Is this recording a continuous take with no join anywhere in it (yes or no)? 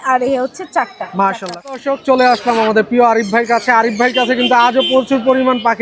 no